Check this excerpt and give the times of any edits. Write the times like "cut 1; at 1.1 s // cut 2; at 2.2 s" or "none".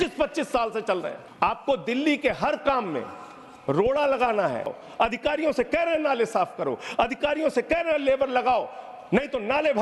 cut 1; at 1.2 s // cut 2; at 4.8 s